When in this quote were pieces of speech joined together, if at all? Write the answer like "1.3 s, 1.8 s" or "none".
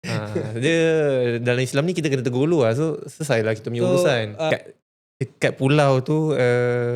4.5 s